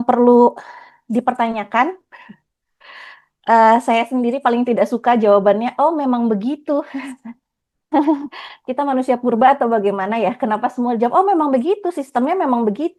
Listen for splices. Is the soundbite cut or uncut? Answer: uncut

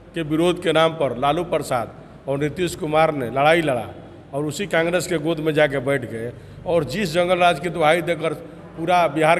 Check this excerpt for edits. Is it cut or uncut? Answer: uncut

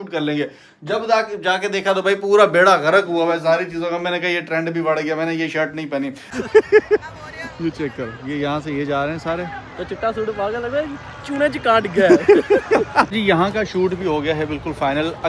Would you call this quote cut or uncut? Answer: cut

